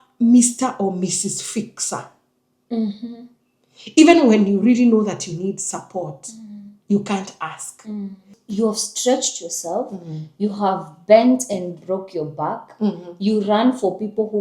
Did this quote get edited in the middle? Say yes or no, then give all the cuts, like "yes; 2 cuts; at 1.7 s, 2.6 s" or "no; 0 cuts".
yes; 1 cut; at 8.4 s